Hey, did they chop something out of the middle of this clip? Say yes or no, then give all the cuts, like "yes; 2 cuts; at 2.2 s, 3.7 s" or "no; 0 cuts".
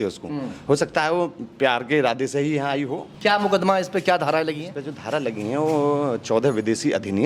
yes; 1 cut; at 3.1 s